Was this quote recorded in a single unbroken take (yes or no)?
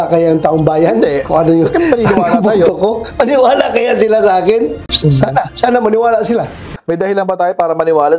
no